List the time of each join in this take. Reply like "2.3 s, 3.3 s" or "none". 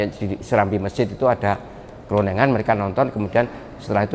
none